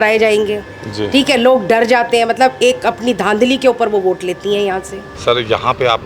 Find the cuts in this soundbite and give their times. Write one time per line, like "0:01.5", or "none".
none